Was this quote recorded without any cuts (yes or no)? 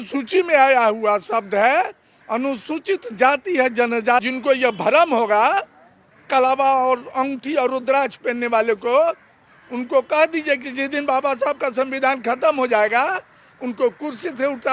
no